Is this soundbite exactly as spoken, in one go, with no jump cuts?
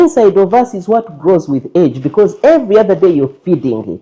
yes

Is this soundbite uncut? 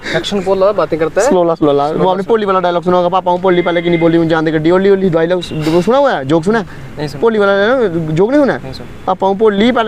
yes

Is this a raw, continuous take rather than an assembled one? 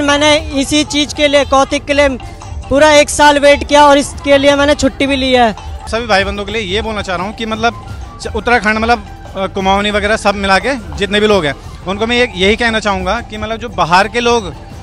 no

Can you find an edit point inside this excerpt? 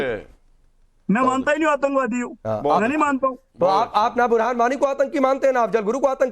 yes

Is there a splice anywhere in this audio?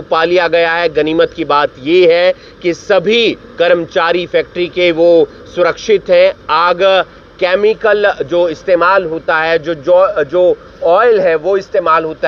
no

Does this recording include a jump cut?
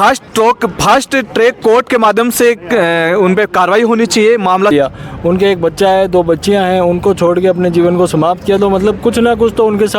yes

